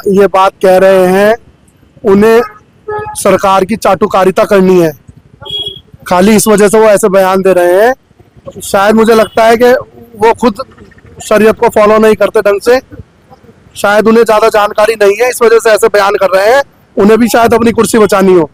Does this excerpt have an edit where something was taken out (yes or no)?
no